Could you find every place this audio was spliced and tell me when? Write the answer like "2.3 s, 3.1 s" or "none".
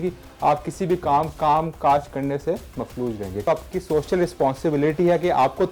3.5 s

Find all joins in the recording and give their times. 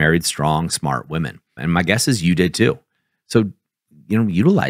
1.4 s

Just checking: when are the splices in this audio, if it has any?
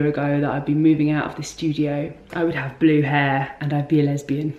2.2 s, 3.6 s

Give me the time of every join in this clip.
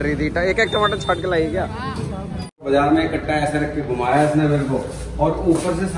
2.6 s

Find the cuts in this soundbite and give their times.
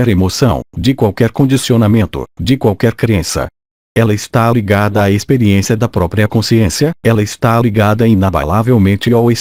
none

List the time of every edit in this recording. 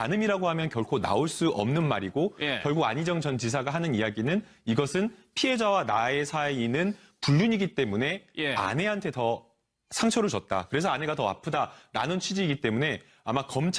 7.9 s

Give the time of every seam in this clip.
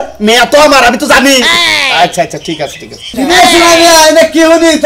3.1 s

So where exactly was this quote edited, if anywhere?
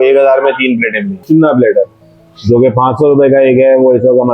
1.2 s

